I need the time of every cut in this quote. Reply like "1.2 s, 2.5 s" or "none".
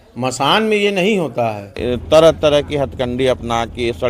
1.8 s